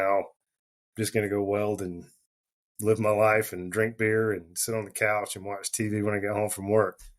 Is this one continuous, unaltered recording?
yes; 0 cuts

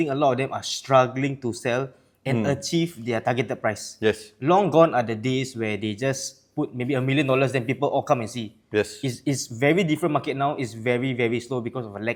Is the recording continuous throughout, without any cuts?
yes; 0 cuts

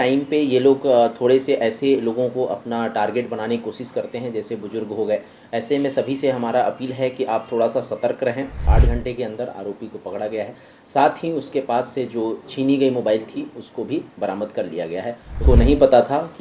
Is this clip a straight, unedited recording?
no; 2 cuts; at 8.6 s, 15.4 s

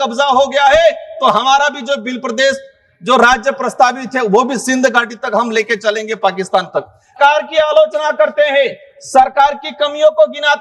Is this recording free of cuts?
no; 1 cut; at 7.1 s

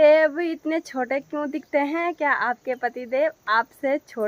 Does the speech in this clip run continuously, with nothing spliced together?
yes; 0 cuts

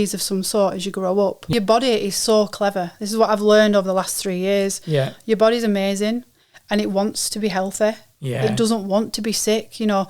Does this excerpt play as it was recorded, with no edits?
no; 1 cut; at 1.4 s

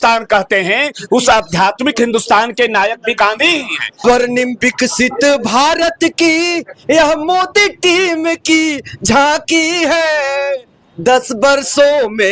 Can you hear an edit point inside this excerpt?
yes; 1 cut; at 3.9 s

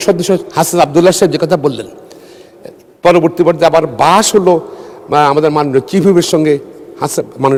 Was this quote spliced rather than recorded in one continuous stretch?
no; 0 cuts

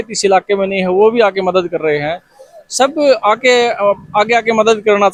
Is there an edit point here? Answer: no; 0 cuts

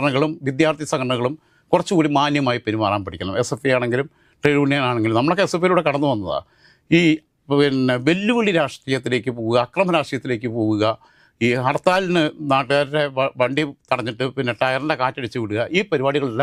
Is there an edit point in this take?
no; 0 cuts

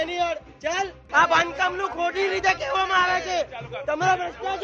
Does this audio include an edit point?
yes; 1 cut; at 1.0 s

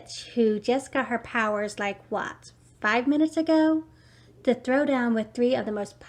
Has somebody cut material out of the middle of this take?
no; 0 cuts

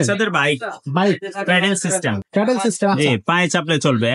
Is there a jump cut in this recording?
no; 0 cuts

